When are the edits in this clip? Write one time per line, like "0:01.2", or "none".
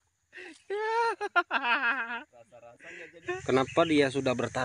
0:03.3